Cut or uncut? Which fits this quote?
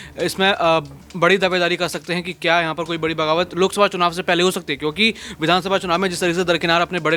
uncut